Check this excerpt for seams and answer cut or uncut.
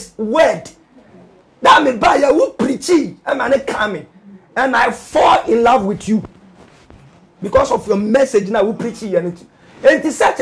uncut